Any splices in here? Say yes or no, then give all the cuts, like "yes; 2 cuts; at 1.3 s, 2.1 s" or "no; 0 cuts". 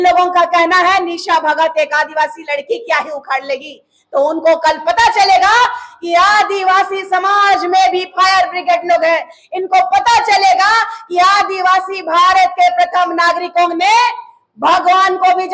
no; 0 cuts